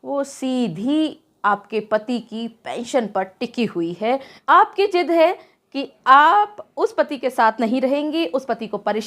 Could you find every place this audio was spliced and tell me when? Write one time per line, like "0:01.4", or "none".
0:04.3